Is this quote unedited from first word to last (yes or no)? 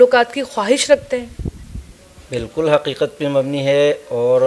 yes